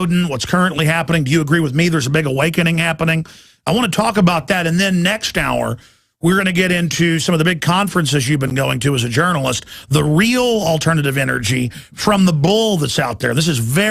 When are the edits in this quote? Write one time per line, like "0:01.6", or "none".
none